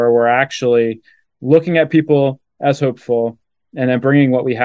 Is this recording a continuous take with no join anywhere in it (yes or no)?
yes